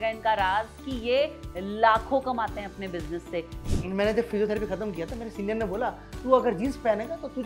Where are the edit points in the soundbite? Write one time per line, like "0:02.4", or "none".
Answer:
0:03.7